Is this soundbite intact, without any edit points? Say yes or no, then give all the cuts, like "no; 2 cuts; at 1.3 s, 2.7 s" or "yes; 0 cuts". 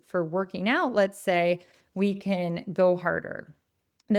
yes; 0 cuts